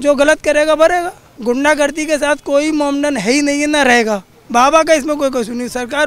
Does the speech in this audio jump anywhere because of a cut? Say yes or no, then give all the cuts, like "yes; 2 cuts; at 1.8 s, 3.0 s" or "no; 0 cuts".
yes; 2 cuts; at 1.2 s, 4.3 s